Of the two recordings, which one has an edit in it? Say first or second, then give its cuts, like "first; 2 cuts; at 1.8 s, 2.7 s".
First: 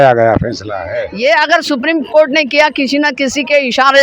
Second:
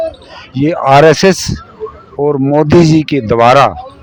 first; 1 cut; at 1.1 s